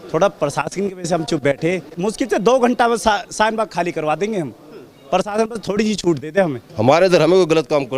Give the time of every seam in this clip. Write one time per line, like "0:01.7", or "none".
0:01.9
0:06.6